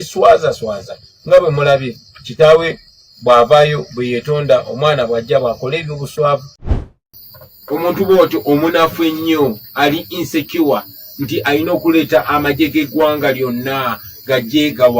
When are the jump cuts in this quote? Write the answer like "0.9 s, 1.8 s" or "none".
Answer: 6.6 s